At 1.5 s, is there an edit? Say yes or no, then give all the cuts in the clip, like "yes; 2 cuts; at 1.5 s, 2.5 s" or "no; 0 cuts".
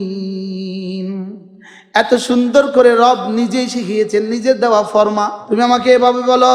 no; 1 cut; at 5.4 s